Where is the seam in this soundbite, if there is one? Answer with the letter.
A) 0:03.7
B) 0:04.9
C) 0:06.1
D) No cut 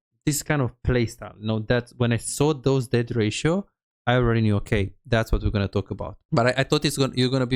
C